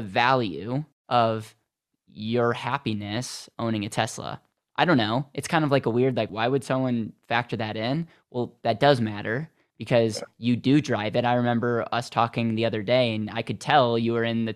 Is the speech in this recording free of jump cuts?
no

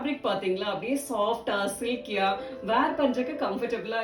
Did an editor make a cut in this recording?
no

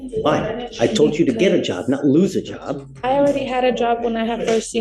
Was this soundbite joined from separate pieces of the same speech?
no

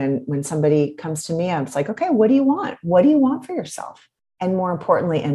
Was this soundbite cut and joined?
no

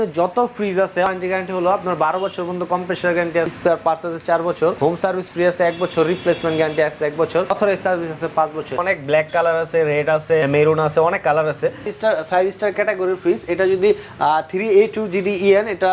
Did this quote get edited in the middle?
yes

